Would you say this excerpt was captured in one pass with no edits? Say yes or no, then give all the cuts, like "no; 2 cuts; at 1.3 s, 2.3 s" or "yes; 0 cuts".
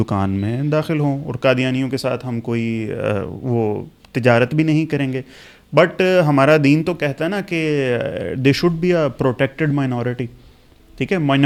yes; 0 cuts